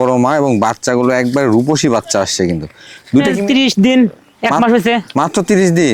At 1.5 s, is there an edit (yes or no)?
no